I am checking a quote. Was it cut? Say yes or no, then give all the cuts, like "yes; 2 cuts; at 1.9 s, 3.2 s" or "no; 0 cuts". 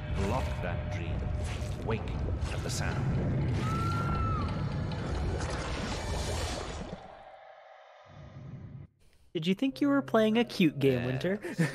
yes; 1 cut; at 8.7 s